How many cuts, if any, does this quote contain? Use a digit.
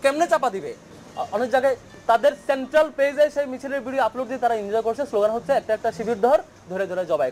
1